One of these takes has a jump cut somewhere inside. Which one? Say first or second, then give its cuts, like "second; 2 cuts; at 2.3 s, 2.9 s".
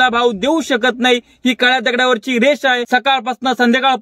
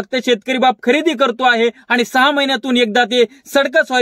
first; 1 cut; at 2.8 s